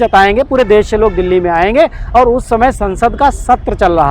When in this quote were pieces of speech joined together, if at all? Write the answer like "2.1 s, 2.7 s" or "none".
none